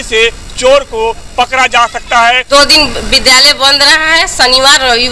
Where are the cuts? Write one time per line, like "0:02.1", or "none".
0:02.4